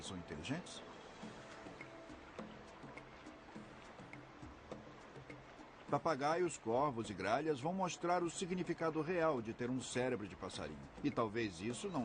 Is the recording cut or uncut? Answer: cut